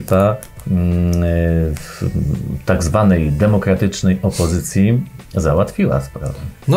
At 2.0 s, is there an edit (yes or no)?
no